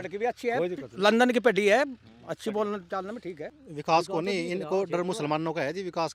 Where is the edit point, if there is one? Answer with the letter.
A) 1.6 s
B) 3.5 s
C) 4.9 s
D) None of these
B